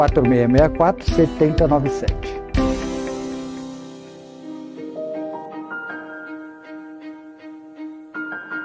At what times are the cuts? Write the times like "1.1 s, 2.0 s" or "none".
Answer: 4.4 s